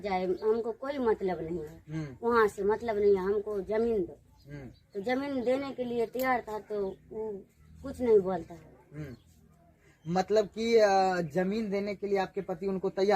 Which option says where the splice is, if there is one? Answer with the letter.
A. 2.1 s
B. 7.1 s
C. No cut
C